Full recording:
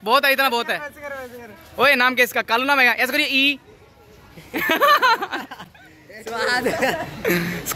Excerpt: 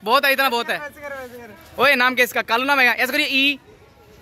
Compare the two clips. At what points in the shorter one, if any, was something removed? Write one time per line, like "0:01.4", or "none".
none